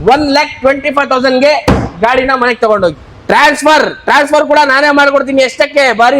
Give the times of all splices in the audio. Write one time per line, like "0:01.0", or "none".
0:03.0